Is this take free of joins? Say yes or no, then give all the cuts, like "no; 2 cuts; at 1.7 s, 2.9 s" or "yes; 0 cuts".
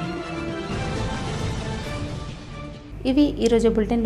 yes; 0 cuts